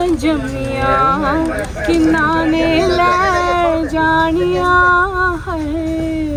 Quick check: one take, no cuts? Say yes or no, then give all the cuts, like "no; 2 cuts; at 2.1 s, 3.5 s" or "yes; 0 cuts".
yes; 0 cuts